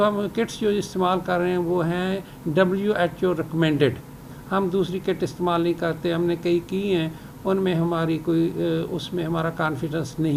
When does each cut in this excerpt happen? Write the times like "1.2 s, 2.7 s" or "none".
none